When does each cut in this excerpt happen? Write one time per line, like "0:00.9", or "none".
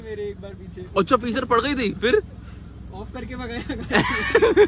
none